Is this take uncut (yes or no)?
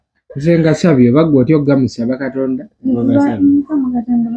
yes